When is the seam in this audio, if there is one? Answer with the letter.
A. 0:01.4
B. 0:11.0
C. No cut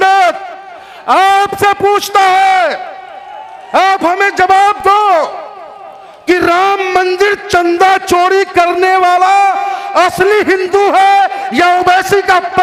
C